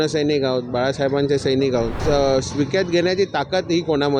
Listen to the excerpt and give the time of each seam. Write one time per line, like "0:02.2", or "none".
0:02.0